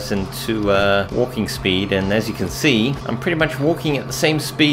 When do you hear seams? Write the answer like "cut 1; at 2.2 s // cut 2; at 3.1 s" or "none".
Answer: cut 1; at 1.1 s // cut 2; at 3.0 s